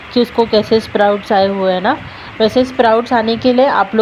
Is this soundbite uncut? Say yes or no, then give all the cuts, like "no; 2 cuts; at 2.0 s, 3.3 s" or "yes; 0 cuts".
yes; 0 cuts